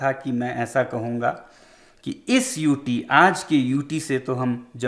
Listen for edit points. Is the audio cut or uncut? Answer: uncut